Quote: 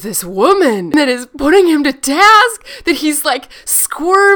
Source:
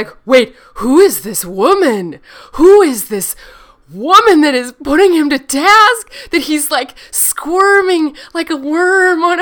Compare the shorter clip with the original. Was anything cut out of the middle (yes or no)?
yes